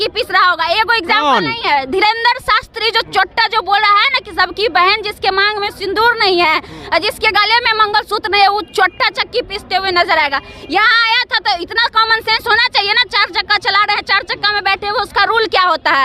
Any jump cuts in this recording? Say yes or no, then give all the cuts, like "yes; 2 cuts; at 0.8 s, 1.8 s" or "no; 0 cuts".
no; 0 cuts